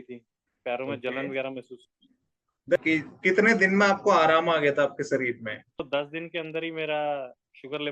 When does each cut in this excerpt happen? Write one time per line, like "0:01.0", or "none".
0:02.8

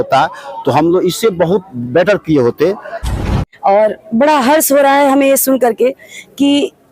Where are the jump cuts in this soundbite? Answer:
0:03.2

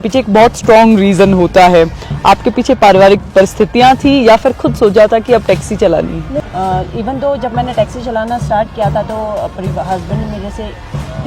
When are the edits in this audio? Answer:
0:06.4

